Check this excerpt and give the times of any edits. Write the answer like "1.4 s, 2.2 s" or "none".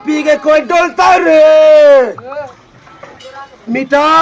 2.6 s